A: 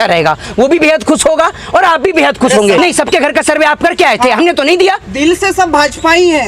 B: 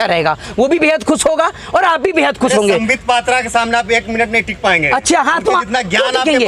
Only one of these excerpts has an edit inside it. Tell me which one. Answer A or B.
A